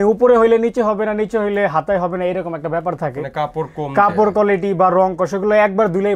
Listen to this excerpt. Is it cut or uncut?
uncut